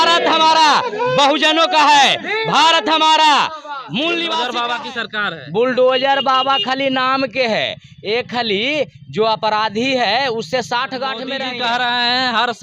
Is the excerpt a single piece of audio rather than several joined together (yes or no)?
no